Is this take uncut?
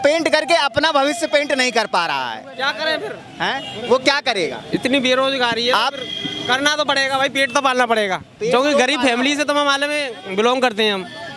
yes; 0 cuts

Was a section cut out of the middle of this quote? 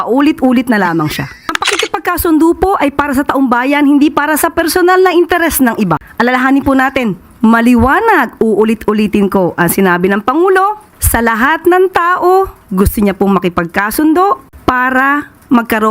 yes; 1 cut; at 1.5 s

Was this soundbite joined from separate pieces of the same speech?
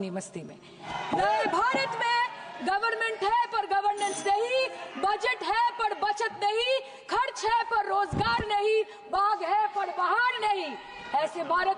yes; 1 cut; at 1.0 s

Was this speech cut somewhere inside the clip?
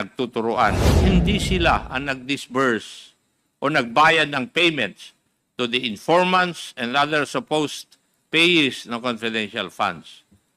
yes; 1 cut; at 1.0 s

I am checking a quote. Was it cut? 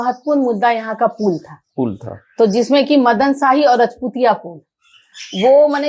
no; 0 cuts

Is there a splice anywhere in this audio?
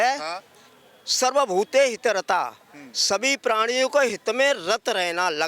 no; 0 cuts

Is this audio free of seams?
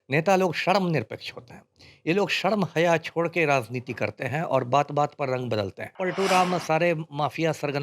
no; 1 cut; at 6.0 s

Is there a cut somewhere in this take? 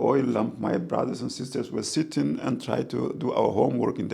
no; 0 cuts

